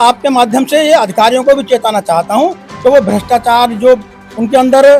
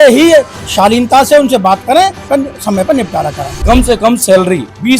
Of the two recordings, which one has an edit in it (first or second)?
second